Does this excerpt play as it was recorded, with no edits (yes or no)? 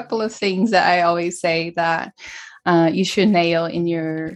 yes